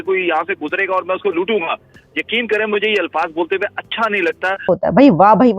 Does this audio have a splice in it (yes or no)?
yes